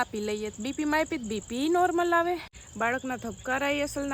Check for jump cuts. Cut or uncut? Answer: cut